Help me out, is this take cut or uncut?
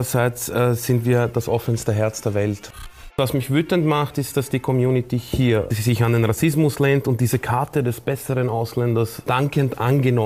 cut